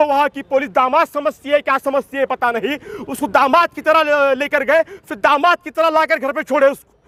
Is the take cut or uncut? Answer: uncut